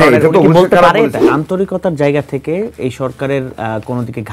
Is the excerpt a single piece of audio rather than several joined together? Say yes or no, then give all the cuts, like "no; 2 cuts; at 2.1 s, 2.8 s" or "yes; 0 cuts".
no; 1 cut; at 1.2 s